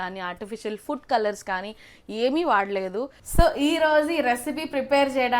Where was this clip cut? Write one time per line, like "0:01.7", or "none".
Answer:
0:03.2